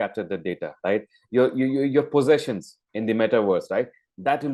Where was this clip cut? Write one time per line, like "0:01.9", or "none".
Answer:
none